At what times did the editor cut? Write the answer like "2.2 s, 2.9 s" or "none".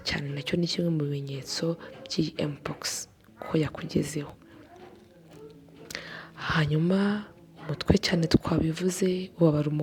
none